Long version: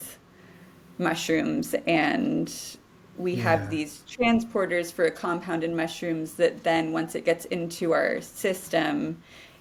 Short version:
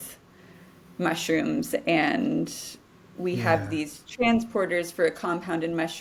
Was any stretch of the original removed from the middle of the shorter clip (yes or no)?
no